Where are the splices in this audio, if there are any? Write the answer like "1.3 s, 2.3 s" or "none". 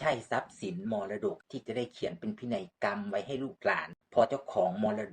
1.4 s, 3.9 s